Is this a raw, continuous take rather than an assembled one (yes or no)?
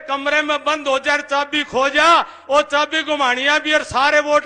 yes